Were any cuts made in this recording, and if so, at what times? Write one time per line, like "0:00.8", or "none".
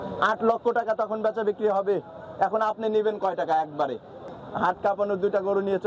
0:04.4